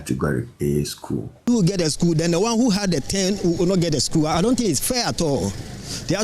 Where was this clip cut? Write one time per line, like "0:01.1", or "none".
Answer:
0:01.5